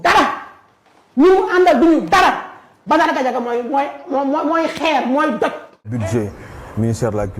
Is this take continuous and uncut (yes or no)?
no